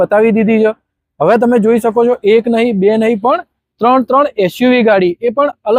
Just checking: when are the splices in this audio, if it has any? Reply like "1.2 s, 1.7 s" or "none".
none